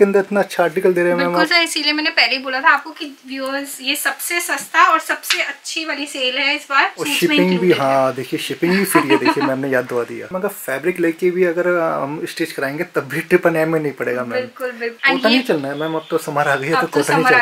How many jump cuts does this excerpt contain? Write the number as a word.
three